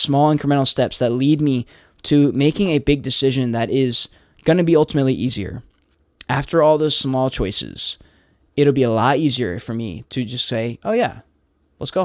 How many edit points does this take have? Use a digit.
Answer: 0